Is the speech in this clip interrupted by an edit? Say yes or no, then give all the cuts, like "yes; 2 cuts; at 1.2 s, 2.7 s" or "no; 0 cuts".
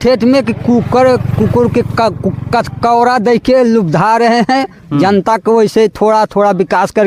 no; 0 cuts